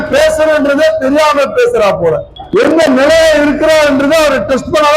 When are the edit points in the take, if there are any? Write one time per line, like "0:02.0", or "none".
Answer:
0:02.3